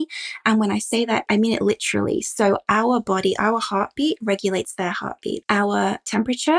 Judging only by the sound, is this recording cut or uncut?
cut